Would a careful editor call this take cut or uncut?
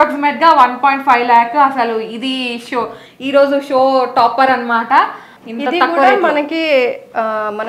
cut